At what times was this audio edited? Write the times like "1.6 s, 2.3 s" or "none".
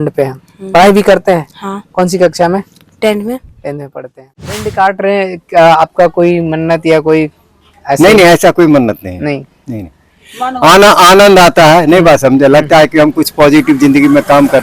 4.7 s

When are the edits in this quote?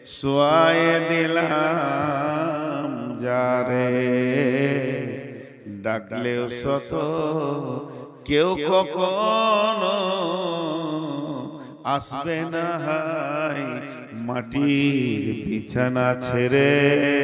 none

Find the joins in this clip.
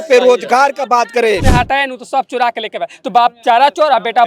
1.4 s

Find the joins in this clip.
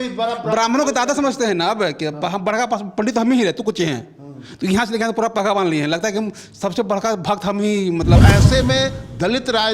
8.2 s

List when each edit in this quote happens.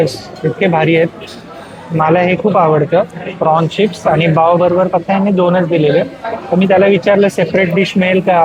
none

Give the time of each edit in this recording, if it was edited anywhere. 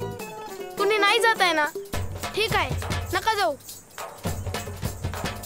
none

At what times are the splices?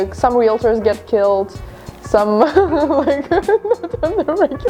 none

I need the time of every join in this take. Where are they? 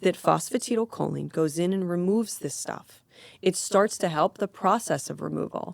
none

